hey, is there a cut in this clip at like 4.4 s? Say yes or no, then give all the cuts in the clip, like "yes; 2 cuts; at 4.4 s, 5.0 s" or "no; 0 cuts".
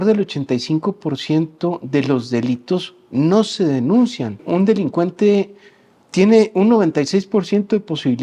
yes; 1 cut; at 4.4 s